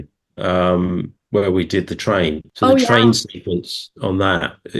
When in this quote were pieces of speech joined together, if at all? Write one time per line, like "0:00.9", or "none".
0:02.5